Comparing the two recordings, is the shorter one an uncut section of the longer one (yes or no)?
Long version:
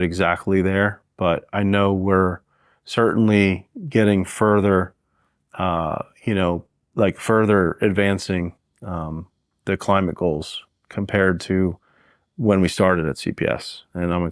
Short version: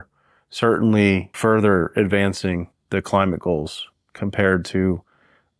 no